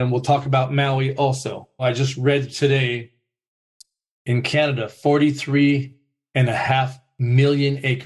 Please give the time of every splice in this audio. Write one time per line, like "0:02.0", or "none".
0:01.8